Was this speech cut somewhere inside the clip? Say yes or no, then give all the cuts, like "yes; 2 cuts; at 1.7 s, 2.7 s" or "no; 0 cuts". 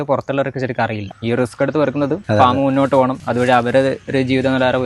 yes; 3 cuts; at 1.1 s, 2.2 s, 3.2 s